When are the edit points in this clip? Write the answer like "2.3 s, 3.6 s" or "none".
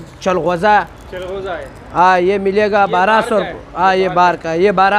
none